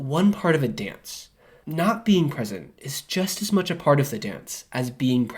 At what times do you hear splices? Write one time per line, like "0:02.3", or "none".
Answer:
0:01.6

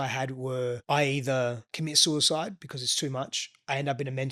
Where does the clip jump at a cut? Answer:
0:00.8
0:01.7

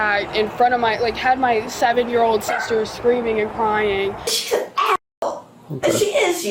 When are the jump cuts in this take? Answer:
0:04.4

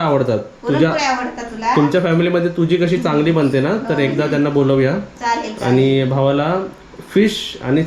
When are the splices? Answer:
none

